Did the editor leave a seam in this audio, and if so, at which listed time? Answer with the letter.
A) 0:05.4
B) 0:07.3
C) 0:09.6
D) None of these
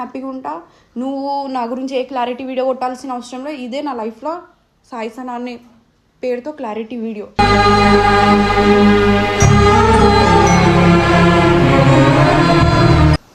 D